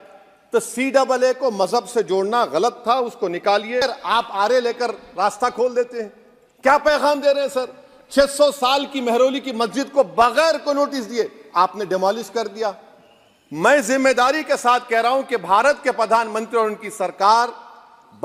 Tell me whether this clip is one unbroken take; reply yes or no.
no